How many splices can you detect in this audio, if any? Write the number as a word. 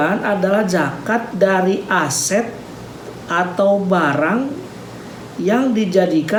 zero